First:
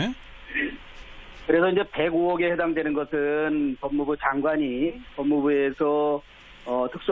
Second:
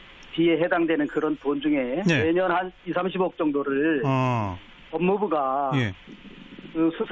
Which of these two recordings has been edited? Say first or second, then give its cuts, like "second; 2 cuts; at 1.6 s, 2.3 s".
first; 1 cut; at 2.1 s